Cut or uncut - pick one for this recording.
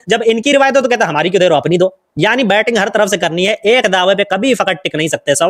uncut